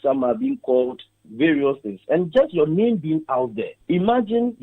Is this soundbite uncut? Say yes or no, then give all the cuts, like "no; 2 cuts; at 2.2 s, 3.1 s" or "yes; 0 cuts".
no; 1 cut; at 3.7 s